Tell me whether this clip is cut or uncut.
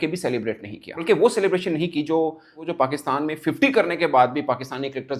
cut